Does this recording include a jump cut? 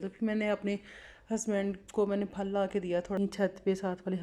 yes; 1 cut; at 3.1 s

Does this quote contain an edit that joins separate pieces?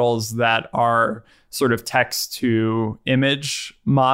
no; 0 cuts

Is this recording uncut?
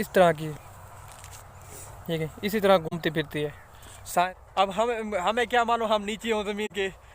no; 1 cut; at 4.2 s

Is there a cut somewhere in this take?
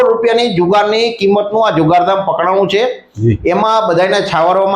no; 0 cuts

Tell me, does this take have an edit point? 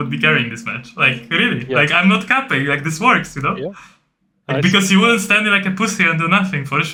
no; 0 cuts

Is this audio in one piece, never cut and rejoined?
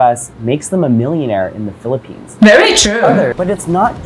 no; 2 cuts; at 2.2 s, 3.2 s

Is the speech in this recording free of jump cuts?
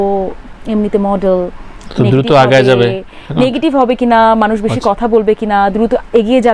yes; 0 cuts

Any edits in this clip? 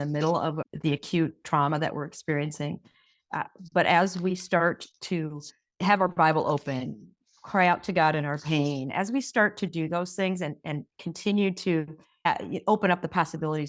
yes; 2 cuts; at 5.8 s, 12.2 s

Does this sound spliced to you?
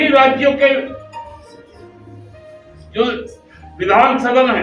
yes; 2 cuts; at 1.4 s, 2.9 s

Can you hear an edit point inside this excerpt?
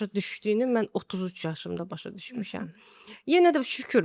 no; 0 cuts

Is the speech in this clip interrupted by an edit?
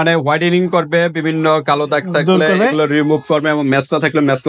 no; 0 cuts

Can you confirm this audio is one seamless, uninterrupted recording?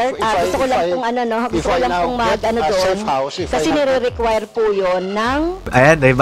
yes; 0 cuts

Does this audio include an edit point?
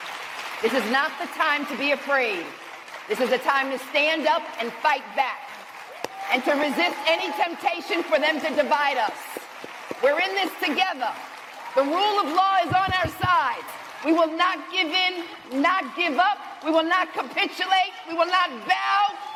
no; 0 cuts

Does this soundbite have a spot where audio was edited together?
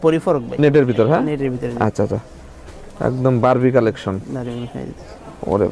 no; 0 cuts

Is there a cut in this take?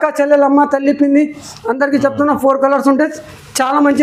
no; 0 cuts

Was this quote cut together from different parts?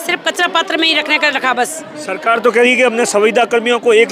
no; 0 cuts

